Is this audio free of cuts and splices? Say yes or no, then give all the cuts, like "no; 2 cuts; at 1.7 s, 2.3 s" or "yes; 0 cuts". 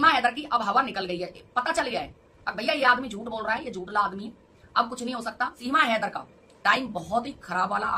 no; 1 cut; at 5.6 s